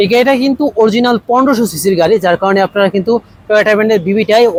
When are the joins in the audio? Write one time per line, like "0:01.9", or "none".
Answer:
none